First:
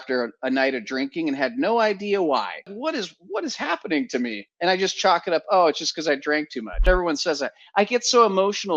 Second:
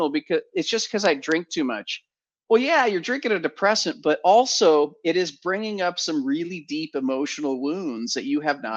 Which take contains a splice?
first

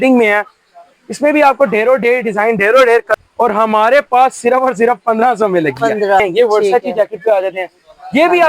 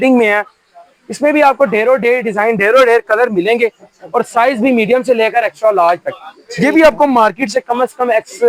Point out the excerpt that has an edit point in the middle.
first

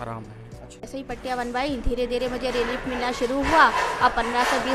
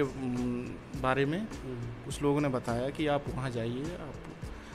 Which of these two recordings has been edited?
first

